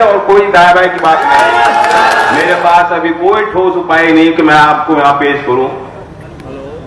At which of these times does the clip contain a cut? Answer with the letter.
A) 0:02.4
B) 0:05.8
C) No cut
A